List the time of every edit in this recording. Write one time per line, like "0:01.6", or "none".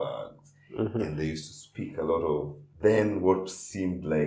0:02.6

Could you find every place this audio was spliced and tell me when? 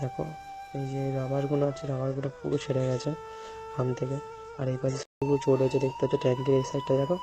0:05.0

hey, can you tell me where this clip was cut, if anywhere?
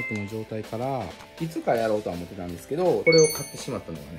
0:01.2
0:03.0

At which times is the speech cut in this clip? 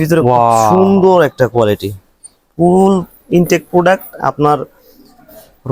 none

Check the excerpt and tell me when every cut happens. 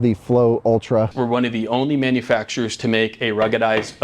0:01.1

